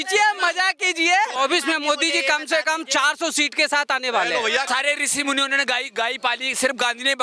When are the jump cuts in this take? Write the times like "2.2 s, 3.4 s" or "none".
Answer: 1.3 s, 4.7 s